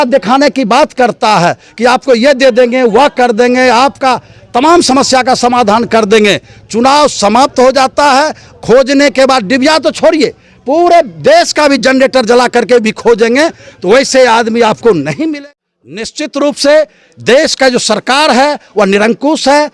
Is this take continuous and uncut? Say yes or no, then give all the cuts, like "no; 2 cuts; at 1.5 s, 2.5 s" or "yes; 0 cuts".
no; 1 cut; at 15.3 s